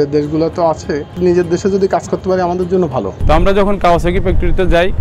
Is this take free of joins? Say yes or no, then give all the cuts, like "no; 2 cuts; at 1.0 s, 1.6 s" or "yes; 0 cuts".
no; 2 cuts; at 1.2 s, 3.2 s